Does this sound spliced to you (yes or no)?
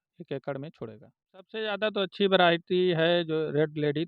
yes